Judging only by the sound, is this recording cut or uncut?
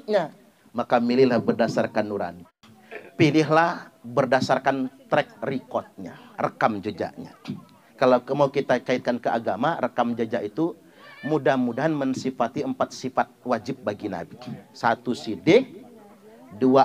cut